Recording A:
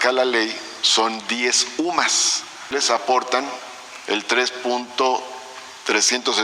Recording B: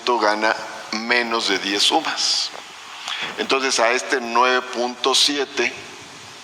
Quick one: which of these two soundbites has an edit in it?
A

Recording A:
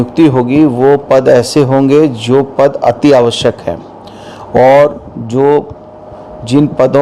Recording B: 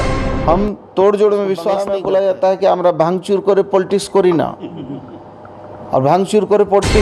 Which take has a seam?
B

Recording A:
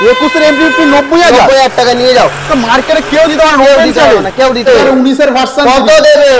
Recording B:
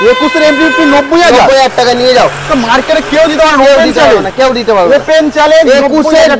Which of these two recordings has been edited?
A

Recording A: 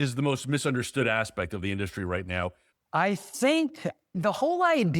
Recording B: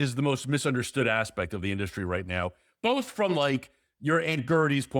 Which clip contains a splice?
A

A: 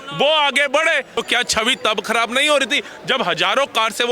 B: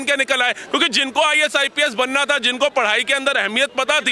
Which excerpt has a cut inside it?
A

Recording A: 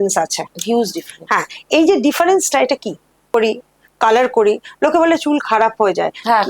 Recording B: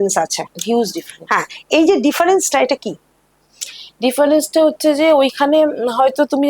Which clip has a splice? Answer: A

